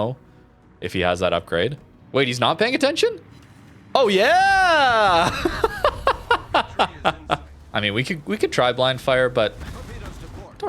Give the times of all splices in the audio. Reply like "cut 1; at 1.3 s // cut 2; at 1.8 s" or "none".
cut 1; at 7.5 s